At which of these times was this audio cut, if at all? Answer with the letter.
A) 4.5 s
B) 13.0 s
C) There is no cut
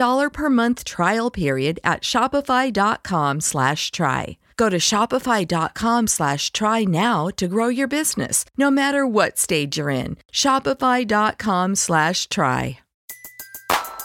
B